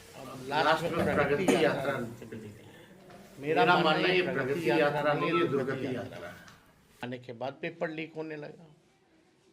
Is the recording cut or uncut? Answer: cut